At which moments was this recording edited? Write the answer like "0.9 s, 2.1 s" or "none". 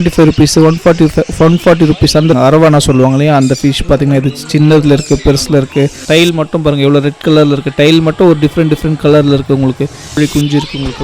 2.3 s, 6.0 s, 10.1 s